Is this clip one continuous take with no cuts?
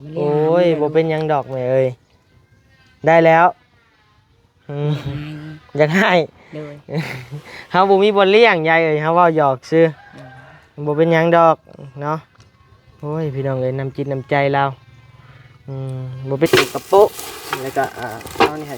no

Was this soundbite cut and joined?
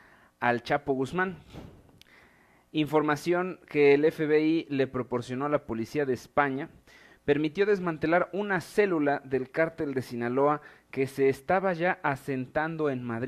yes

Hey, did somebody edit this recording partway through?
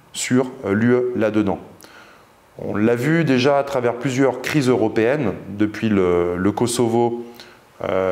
no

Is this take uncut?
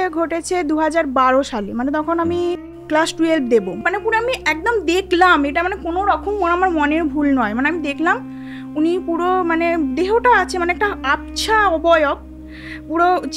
no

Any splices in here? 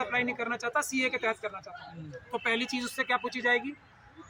no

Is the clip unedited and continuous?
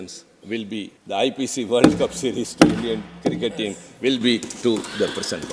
no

